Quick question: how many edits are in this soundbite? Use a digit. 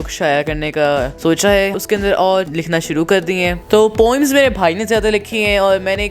4